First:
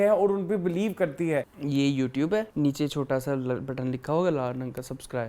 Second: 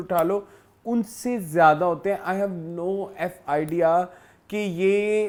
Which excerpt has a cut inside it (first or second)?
first